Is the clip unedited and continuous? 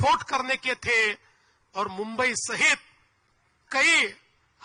yes; 0 cuts

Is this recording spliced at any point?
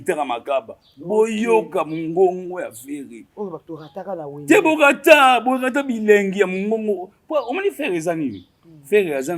no; 0 cuts

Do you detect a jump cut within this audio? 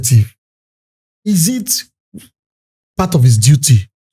no; 0 cuts

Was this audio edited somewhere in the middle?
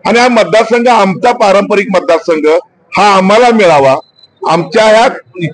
no; 0 cuts

